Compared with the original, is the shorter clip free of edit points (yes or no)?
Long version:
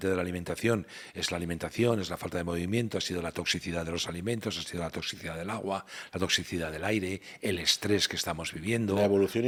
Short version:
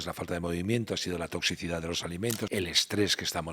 no